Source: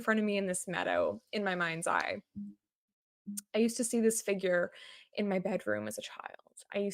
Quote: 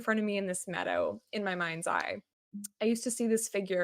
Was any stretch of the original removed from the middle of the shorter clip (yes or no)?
yes